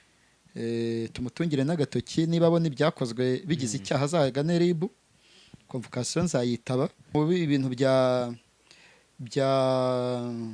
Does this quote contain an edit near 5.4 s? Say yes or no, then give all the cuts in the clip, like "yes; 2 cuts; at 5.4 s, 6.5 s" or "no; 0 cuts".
no; 1 cut; at 7.0 s